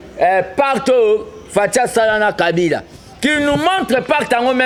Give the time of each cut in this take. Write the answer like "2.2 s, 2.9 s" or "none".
none